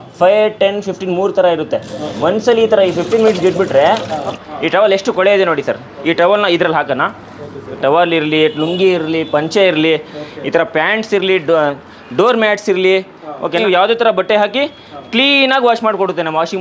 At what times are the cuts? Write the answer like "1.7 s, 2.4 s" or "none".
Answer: 4.4 s, 7.8 s, 13.6 s